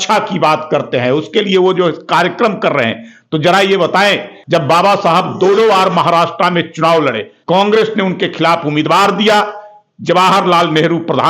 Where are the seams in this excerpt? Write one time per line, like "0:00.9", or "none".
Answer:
0:04.3
0:07.3